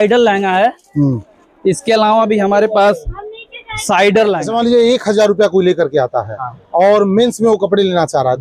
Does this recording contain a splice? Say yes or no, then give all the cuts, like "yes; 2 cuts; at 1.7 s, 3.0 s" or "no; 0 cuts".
yes; 1 cut; at 4.5 s